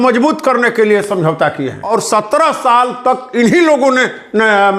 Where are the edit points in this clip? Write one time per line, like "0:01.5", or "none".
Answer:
0:01.8